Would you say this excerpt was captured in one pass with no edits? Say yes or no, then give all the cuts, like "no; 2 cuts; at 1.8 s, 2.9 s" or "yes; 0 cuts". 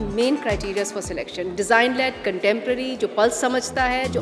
yes; 0 cuts